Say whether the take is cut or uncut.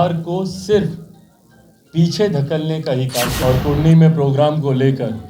cut